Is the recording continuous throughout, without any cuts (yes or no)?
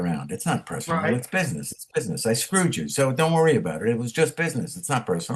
yes